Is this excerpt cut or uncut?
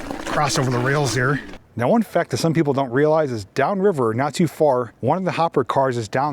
cut